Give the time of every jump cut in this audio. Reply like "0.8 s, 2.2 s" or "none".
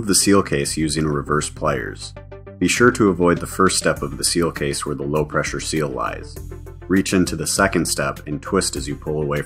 none